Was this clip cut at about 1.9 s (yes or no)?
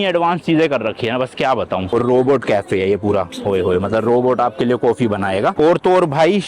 yes